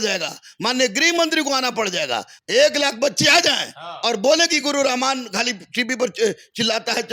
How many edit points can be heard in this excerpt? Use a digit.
1